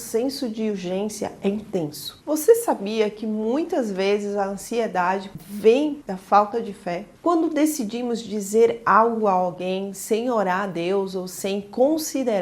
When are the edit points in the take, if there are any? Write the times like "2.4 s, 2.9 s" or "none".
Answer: 2.1 s, 7.1 s

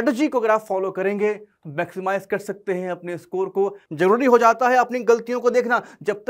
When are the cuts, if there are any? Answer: 3.8 s

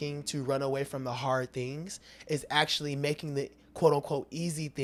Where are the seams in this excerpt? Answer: none

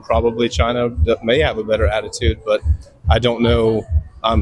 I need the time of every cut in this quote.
none

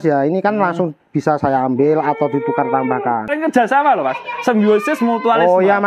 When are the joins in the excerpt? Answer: 3.3 s

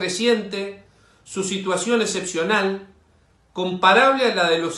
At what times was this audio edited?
none

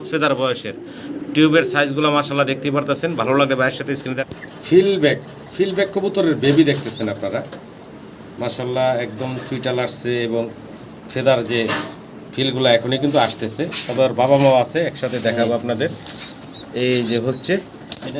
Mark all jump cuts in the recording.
4.2 s

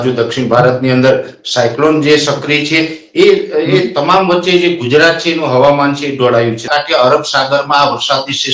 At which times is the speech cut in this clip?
6.7 s

